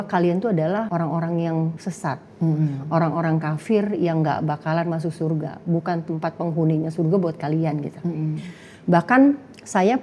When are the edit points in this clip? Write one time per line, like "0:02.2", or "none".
0:00.9
0:01.8